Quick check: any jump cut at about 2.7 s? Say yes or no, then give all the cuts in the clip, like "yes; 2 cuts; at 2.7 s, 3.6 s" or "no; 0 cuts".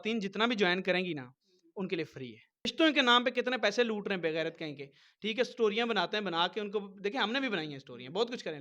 yes; 1 cut; at 2.7 s